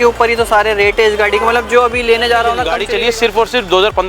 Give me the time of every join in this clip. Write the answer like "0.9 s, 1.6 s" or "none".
2.8 s